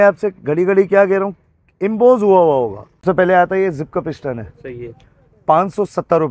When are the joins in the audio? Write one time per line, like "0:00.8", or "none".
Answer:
0:03.0